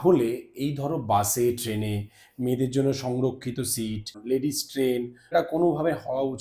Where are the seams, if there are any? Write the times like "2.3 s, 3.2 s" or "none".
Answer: 4.2 s, 5.3 s